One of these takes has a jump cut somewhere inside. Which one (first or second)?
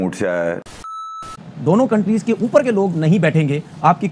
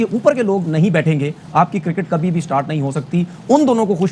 first